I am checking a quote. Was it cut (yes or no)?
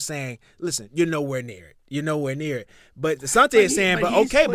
no